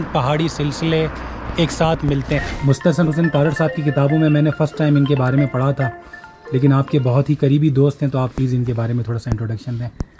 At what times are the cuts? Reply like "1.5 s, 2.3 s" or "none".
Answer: 2.5 s